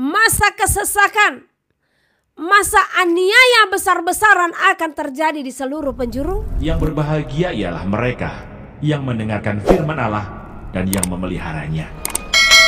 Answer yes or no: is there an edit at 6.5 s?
yes